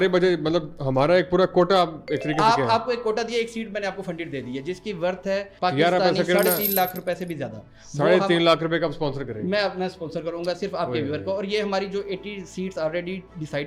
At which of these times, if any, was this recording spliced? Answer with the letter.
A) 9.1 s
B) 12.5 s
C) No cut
C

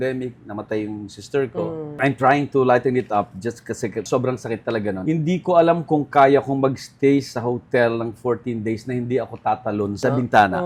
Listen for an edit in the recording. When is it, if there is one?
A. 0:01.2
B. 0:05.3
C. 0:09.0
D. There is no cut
D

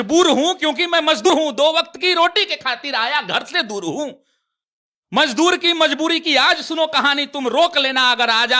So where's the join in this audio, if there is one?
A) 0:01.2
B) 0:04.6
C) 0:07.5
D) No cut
A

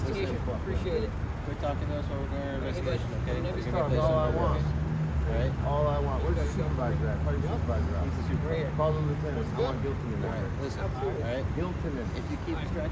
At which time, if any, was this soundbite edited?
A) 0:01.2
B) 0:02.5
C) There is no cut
C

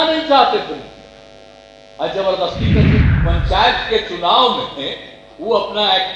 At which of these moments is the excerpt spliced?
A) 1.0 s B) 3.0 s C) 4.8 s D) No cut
B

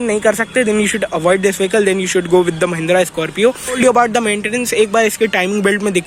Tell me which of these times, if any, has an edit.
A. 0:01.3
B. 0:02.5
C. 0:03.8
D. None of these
C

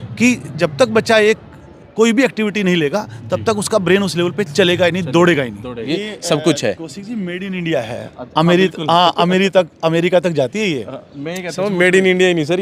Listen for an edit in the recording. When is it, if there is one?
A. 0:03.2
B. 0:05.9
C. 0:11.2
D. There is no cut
B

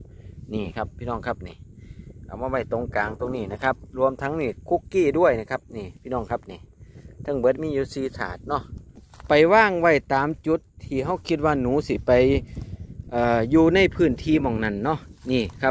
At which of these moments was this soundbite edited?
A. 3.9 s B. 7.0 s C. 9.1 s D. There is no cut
C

